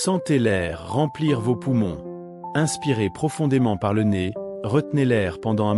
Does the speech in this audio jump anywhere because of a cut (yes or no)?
no